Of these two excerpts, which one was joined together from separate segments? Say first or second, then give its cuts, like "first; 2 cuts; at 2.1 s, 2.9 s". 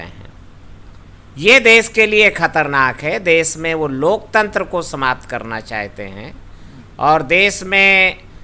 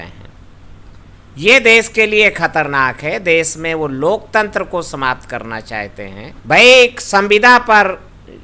second; 1 cut; at 6.3 s